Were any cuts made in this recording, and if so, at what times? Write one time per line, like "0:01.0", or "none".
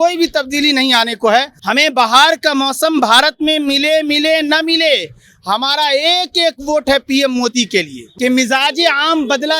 0:01.6
0:08.0